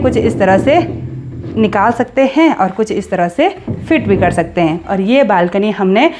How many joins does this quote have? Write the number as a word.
one